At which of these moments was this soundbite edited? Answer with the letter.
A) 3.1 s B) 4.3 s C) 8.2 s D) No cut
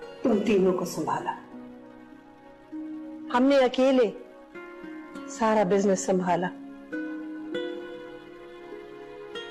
D